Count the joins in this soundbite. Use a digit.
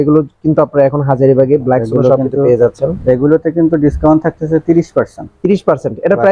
0